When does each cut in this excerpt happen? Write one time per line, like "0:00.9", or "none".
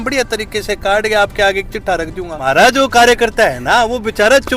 0:02.3

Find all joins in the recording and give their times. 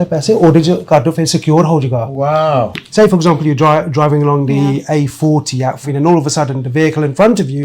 0:02.7
0:05.9

